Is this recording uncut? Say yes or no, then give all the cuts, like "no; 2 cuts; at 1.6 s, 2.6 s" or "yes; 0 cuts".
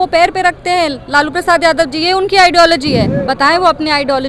no; 1 cut; at 3.1 s